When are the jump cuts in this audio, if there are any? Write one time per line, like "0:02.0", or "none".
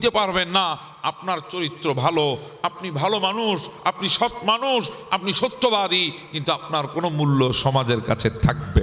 none

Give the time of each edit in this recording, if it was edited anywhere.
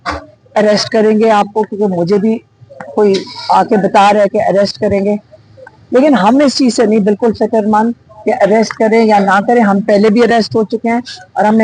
none

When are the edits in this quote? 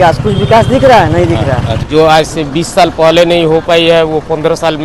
0:01.8

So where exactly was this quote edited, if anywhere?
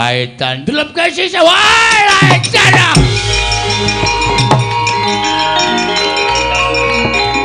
none

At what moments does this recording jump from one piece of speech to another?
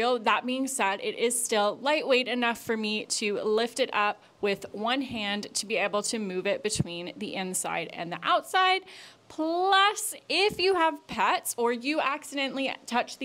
none

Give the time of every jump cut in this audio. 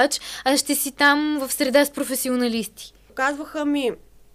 0:03.0

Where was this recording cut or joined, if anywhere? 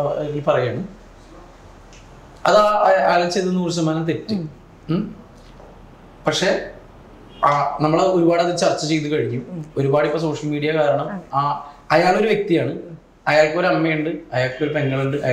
none

